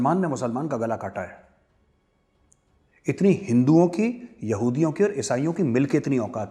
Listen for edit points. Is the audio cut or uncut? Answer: uncut